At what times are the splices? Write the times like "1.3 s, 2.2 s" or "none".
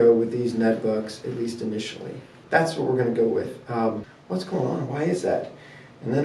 4.1 s